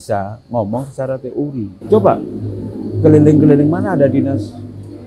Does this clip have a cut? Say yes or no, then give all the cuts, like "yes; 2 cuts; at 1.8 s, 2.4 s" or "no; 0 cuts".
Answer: yes; 1 cut; at 1.7 s